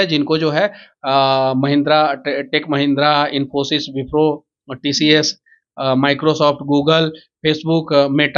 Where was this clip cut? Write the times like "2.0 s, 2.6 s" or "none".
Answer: none